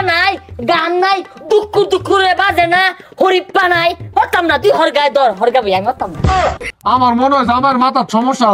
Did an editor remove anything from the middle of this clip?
yes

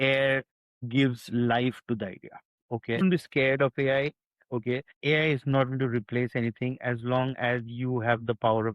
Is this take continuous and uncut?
no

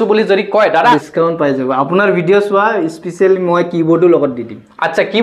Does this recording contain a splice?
yes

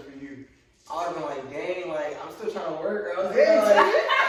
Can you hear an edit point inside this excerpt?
no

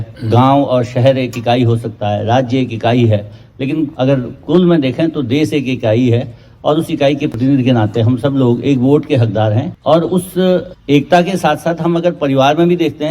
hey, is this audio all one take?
no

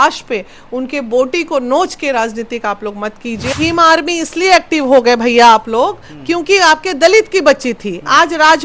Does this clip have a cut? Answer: yes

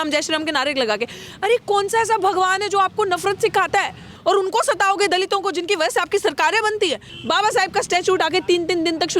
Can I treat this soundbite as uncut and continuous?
no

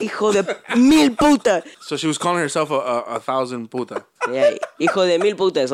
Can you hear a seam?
yes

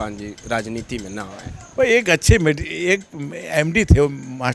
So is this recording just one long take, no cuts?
yes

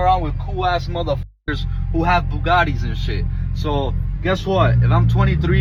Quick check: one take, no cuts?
yes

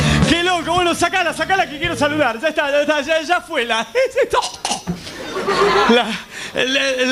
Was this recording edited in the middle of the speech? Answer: no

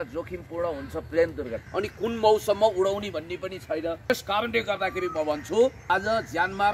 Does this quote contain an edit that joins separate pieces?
yes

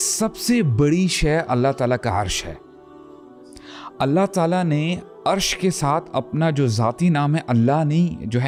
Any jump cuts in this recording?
no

